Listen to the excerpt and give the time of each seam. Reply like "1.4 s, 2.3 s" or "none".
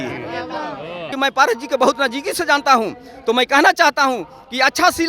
1.1 s